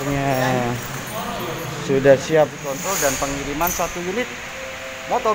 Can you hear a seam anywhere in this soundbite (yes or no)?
yes